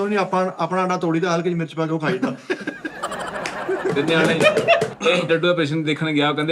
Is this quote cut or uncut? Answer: cut